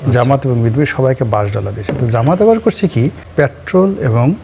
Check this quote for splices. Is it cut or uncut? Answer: cut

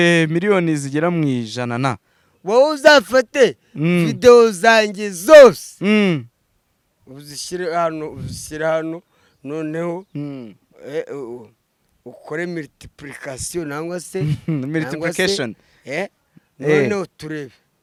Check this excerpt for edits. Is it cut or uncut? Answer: uncut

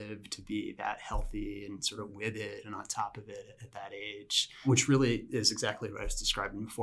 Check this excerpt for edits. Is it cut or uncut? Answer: cut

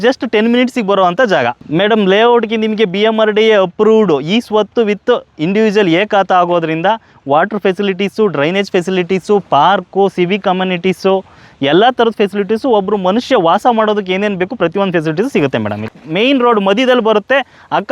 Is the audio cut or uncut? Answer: cut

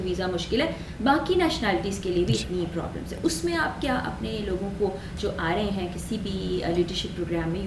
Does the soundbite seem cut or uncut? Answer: uncut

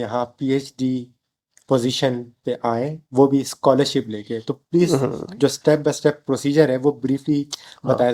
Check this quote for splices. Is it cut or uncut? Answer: uncut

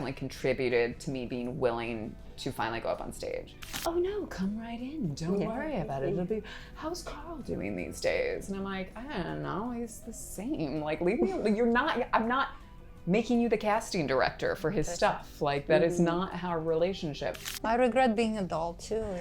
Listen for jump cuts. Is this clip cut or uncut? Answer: cut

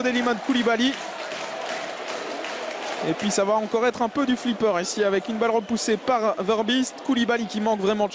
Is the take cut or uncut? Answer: uncut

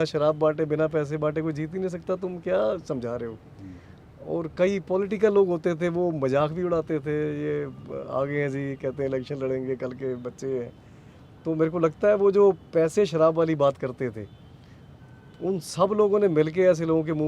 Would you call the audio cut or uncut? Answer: uncut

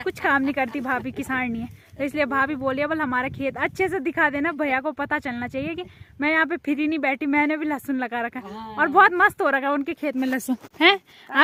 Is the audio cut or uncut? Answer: uncut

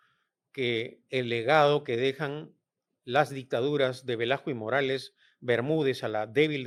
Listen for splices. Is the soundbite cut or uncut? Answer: uncut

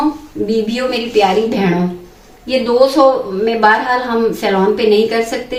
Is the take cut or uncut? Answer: uncut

